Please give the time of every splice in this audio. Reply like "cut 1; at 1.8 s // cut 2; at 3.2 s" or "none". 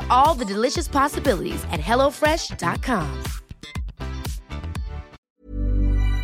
cut 1; at 5.2 s